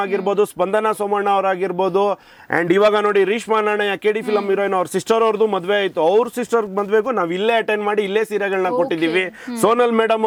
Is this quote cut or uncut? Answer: uncut